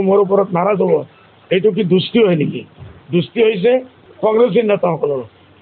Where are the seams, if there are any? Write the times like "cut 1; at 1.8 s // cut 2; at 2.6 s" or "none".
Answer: cut 1; at 4.0 s